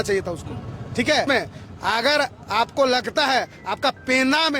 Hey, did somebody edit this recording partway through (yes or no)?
yes